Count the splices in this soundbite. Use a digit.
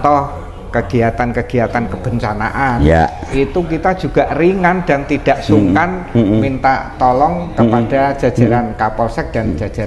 0